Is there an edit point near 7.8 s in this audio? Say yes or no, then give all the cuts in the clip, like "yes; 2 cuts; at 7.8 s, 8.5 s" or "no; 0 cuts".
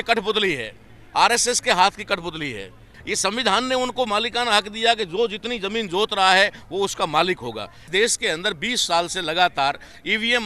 yes; 2 cuts; at 2.8 s, 7.8 s